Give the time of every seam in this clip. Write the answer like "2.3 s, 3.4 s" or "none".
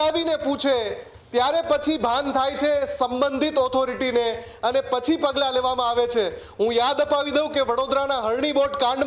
none